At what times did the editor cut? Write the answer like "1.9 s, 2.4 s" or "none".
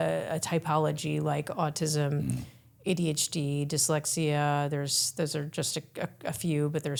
none